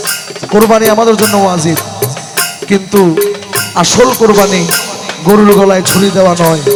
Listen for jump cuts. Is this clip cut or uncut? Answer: uncut